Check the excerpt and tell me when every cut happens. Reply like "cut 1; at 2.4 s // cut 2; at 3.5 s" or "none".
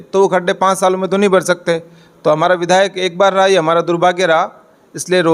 none